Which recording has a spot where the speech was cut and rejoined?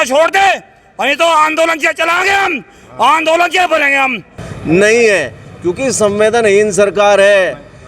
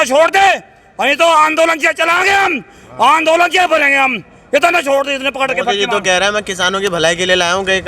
first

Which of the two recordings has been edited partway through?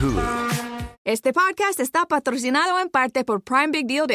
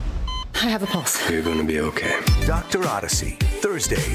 first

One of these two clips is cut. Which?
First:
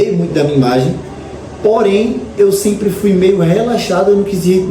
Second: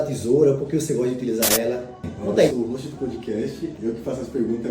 second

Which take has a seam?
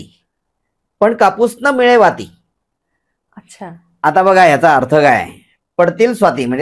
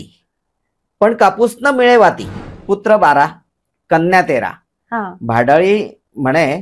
second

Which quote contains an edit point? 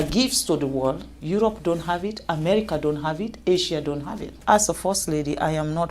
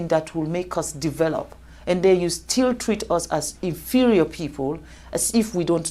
first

